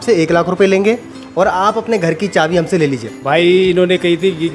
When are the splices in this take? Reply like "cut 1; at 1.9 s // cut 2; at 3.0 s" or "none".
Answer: cut 1; at 3.1 s